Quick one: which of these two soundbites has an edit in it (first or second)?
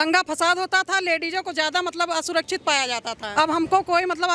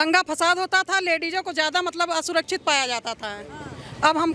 first